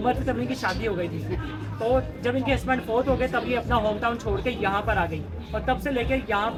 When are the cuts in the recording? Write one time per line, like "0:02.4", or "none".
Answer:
none